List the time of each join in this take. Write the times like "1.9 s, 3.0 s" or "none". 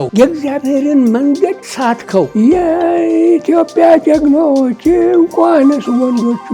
1.9 s